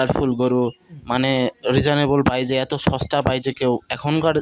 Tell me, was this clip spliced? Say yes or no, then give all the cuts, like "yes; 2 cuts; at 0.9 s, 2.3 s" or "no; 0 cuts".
no; 0 cuts